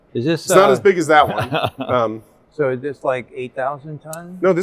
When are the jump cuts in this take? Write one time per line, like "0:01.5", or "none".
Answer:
none